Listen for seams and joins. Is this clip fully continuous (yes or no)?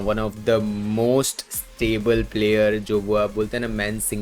yes